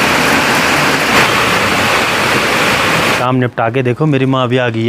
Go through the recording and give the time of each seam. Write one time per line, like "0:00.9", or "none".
0:01.2
0:03.1